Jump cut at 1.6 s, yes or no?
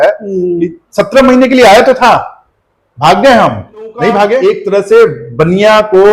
no